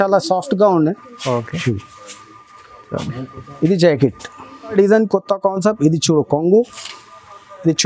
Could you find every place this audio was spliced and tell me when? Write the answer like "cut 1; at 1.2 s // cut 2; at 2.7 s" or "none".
cut 1; at 4.7 s